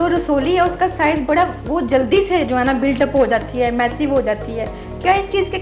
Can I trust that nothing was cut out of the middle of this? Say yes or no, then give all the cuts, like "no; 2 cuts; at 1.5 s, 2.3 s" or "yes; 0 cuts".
yes; 0 cuts